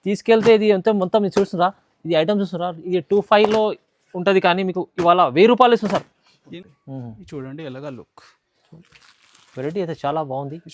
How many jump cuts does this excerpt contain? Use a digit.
1